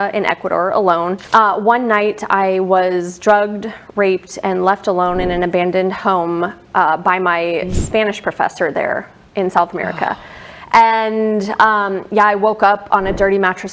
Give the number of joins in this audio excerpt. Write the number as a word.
one